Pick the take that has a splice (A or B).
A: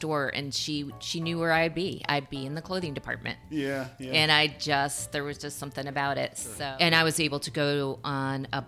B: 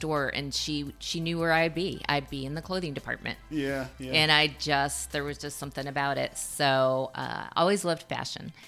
A